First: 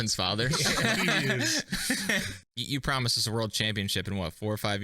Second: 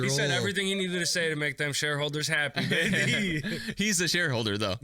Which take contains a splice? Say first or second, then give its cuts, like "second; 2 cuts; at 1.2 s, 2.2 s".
first; 1 cut; at 2.4 s